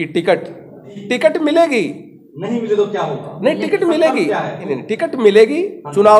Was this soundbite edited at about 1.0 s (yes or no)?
yes